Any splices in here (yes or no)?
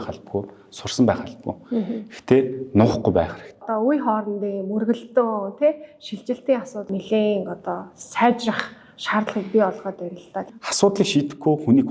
yes